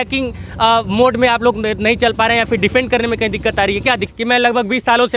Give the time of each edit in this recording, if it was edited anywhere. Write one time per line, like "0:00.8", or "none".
0:04.0